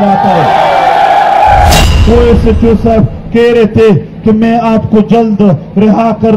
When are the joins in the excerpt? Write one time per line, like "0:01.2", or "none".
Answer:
0:01.8